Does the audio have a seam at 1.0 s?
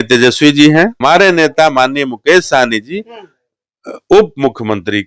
yes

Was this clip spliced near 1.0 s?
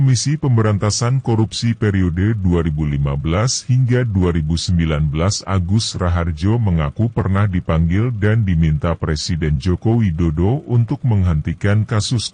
no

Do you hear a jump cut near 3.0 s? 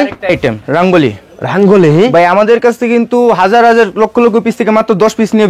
no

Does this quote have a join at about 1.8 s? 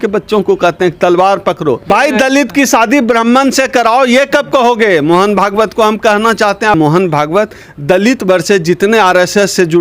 yes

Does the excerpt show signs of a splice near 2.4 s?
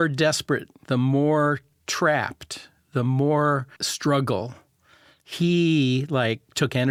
no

